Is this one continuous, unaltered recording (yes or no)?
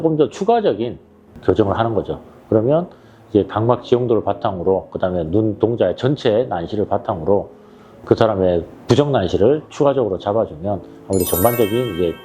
yes